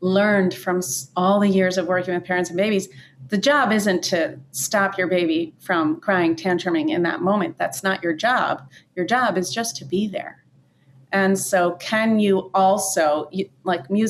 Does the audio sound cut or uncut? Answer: uncut